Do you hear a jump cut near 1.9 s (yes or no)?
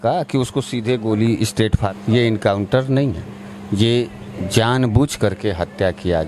yes